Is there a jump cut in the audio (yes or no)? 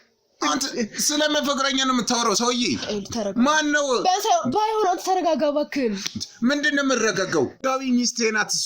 yes